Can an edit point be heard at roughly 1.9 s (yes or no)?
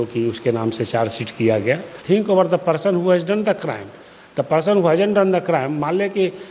yes